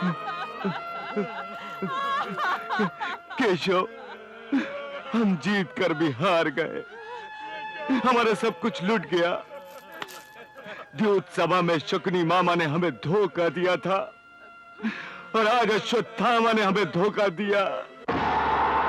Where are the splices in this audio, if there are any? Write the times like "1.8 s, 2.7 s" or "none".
none